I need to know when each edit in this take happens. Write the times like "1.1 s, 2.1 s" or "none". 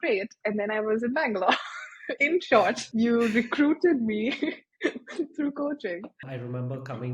2.8 s, 6.2 s